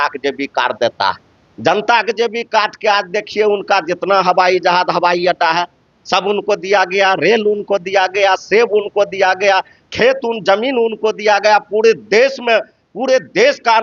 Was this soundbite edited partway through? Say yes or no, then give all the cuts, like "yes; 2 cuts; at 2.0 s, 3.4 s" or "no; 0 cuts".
no; 0 cuts